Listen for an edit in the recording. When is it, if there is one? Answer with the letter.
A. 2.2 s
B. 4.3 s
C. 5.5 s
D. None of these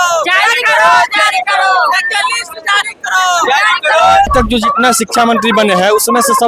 B